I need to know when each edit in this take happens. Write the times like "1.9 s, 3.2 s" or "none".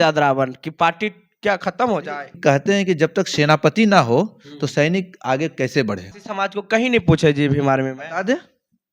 2.4 s, 6.2 s